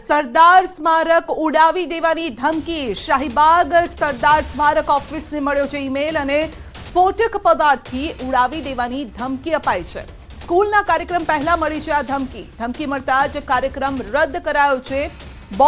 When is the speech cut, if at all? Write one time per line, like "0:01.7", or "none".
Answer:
0:01.3

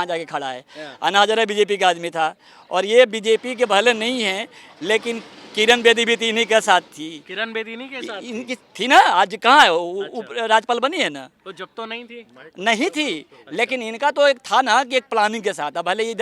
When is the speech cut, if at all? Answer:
none

